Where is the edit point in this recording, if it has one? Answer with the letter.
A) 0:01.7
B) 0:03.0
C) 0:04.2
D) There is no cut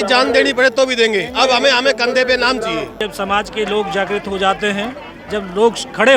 B